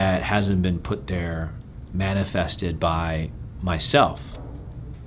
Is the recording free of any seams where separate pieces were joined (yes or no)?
no